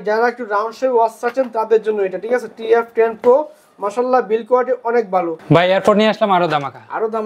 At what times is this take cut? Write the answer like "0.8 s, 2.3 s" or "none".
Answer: 5.4 s